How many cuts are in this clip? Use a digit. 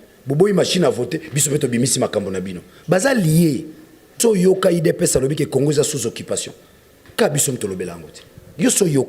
1